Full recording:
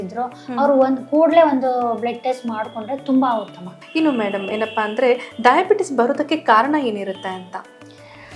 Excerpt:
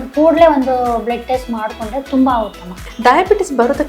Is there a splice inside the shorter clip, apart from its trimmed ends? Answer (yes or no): yes